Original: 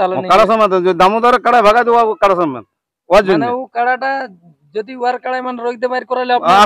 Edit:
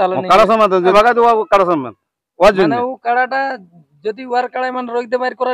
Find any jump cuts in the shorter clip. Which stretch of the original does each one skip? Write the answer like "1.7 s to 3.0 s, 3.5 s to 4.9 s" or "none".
0.9 s to 1.6 s